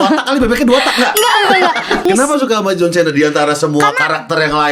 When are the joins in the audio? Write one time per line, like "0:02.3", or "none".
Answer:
0:02.1